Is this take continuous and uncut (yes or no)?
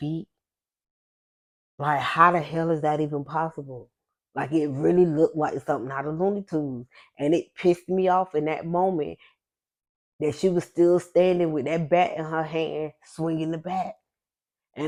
yes